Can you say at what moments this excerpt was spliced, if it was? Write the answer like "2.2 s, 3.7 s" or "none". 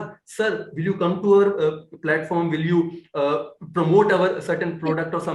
none